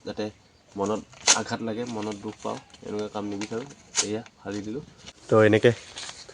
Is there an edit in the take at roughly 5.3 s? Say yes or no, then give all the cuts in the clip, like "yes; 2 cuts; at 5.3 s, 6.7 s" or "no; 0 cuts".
yes; 1 cut; at 5.3 s